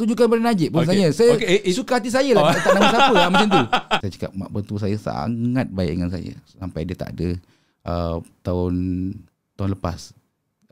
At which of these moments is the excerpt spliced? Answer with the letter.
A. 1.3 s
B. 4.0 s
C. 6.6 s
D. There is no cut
B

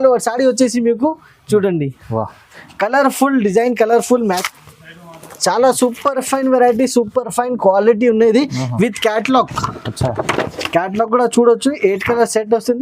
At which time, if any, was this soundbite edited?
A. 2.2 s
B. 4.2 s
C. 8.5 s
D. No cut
B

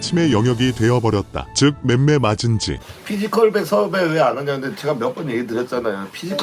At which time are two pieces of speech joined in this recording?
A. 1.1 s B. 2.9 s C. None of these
B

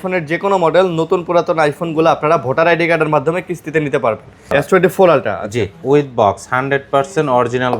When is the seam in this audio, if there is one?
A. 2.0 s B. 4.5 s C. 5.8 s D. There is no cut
B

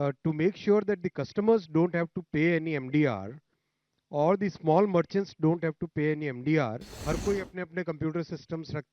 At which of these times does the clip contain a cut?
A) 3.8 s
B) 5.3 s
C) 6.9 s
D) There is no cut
C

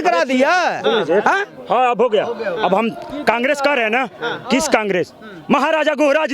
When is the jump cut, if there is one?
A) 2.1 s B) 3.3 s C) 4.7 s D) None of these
D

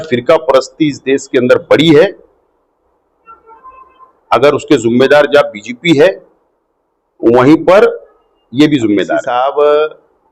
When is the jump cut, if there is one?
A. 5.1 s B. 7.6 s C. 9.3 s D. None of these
C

